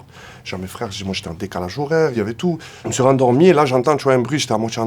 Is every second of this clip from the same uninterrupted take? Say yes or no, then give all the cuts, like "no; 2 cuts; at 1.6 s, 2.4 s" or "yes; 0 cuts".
no; 1 cut; at 2.7 s